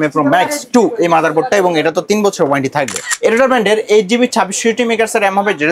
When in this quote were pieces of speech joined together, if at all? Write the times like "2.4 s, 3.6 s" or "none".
3.0 s